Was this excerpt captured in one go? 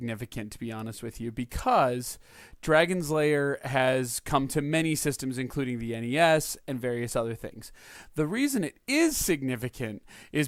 yes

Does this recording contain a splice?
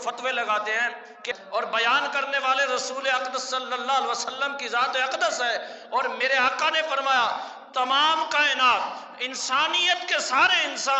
yes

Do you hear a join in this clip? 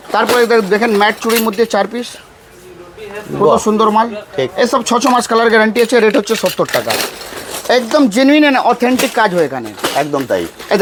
no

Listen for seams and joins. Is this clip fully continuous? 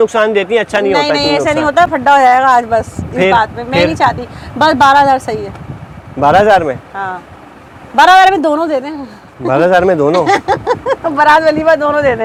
yes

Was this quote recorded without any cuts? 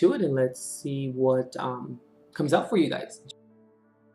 no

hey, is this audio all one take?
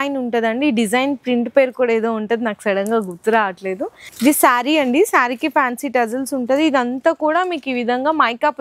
no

